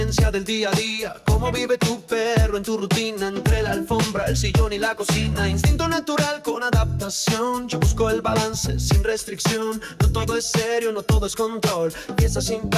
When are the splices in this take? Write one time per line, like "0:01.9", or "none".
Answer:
none

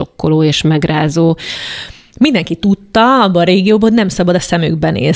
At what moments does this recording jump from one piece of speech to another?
0:01.6

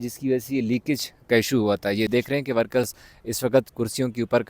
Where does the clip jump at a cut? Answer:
0:02.1

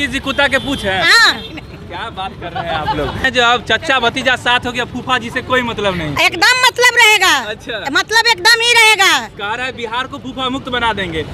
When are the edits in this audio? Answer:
0:03.3

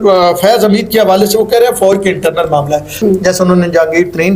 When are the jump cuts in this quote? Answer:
0:03.0

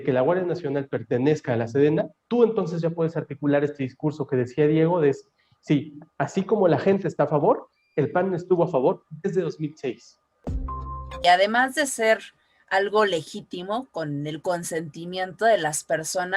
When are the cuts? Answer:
0:10.8

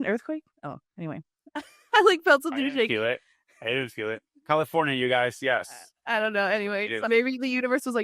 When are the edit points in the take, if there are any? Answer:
0:07.0

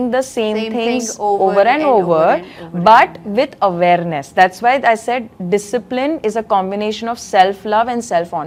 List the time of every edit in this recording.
none

